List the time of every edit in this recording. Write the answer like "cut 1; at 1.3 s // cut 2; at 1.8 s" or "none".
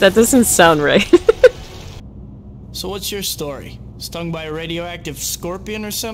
cut 1; at 2.0 s